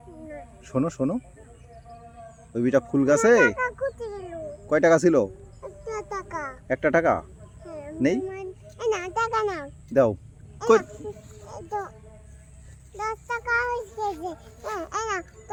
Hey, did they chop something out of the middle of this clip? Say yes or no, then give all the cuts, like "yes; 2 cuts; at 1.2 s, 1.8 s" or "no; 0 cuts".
no; 0 cuts